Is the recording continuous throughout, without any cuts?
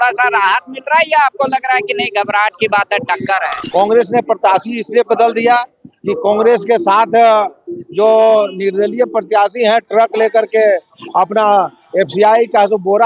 no; 1 cut; at 3.6 s

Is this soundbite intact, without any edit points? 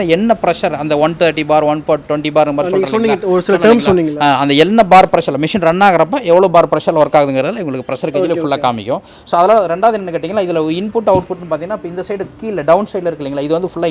yes; 0 cuts

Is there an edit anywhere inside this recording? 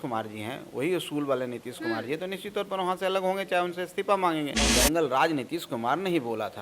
yes; 1 cut; at 4.6 s

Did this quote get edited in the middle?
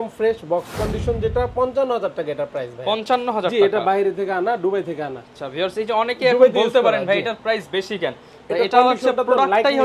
no; 0 cuts

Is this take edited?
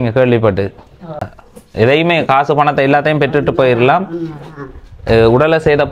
yes; 1 cut; at 1.4 s

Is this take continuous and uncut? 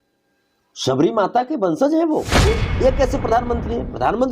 no; 1 cut; at 2.5 s

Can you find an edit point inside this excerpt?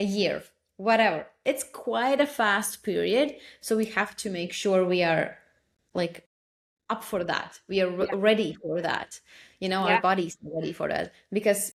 no; 0 cuts

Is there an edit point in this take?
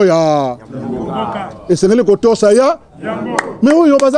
no; 0 cuts

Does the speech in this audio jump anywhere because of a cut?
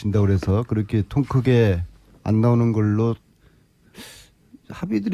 no; 0 cuts

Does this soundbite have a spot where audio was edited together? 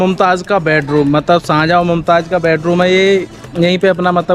no; 0 cuts

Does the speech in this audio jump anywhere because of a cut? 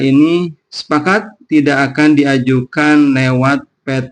no; 0 cuts

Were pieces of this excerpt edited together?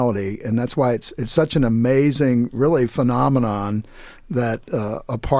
no; 0 cuts

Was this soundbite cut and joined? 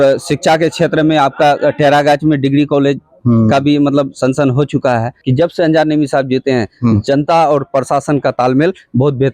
yes; 1 cut; at 5.2 s

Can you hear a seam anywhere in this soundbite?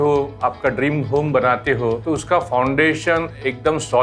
yes; 1 cut; at 2.0 s

